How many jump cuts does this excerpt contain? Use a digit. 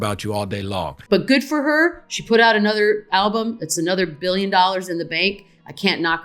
1